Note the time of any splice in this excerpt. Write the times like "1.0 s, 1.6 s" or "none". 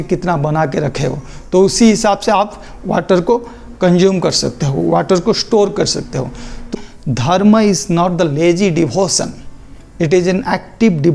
6.7 s